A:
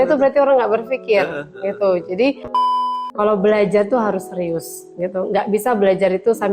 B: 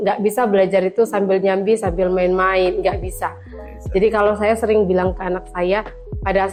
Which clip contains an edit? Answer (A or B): A